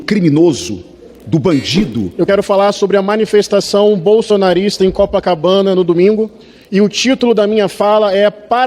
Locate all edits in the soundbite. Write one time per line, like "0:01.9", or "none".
0:02.1